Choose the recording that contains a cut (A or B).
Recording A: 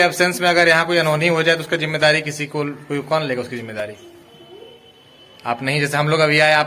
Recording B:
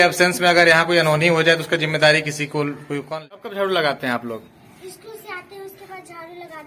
B